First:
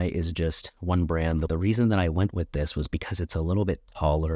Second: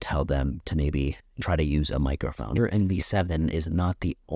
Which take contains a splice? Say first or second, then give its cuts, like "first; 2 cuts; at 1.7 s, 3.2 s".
second; 2 cuts; at 1.3 s, 2.6 s